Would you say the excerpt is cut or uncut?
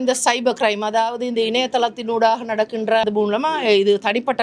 cut